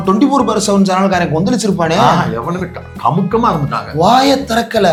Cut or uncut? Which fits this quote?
uncut